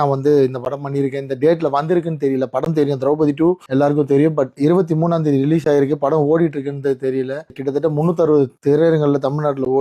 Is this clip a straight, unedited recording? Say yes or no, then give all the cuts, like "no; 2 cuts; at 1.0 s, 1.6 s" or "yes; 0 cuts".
no; 3 cuts; at 3.6 s, 7.6 s, 8.6 s